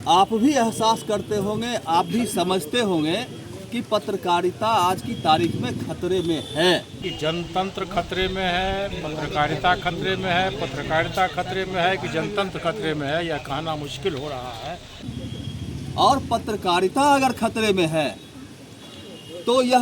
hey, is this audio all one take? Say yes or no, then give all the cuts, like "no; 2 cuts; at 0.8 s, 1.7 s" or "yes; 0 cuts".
no; 2 cuts; at 7.0 s, 15.0 s